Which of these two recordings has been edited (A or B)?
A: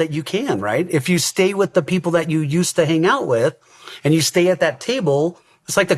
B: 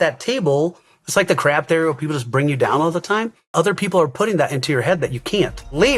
B